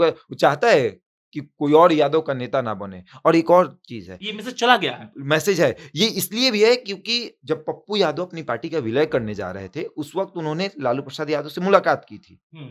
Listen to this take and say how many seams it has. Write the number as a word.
zero